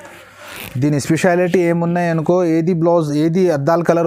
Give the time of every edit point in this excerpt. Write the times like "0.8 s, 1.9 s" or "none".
none